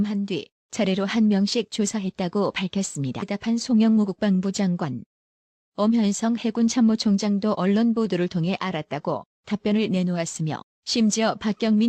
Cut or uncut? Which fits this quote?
uncut